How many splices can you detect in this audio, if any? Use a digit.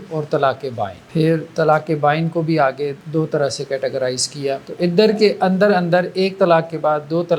3